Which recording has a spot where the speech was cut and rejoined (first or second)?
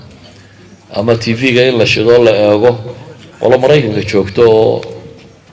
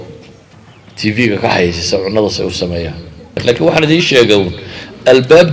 second